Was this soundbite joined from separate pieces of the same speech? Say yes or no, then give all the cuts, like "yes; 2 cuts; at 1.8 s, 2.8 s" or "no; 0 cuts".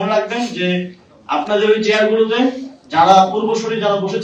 no; 0 cuts